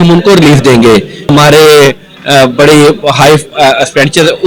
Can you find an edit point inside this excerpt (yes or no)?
yes